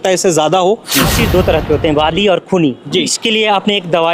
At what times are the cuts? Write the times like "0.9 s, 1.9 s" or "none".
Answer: 1.1 s, 3.1 s